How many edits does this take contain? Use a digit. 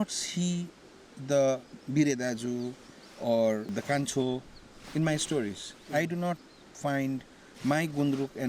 2